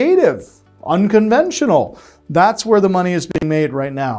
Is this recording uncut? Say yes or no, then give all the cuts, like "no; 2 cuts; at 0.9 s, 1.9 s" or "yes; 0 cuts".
yes; 0 cuts